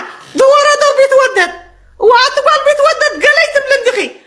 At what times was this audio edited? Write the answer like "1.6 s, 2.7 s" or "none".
none